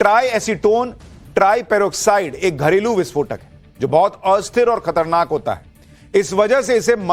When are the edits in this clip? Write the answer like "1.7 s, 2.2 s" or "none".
none